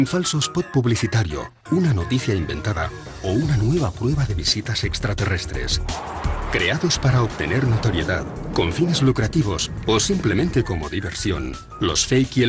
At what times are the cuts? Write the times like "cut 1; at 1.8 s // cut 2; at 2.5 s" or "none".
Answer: cut 1; at 9.7 s